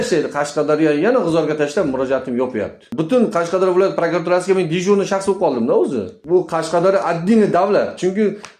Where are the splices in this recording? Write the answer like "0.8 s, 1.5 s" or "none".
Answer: 2.8 s, 6.1 s